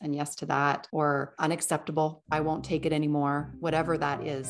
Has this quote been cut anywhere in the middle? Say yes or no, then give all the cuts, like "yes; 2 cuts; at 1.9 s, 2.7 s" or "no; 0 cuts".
yes; 3 cuts; at 0.9 s, 2.2 s, 3.5 s